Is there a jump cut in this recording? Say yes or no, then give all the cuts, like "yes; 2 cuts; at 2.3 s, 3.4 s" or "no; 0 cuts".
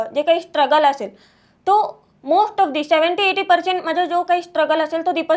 no; 0 cuts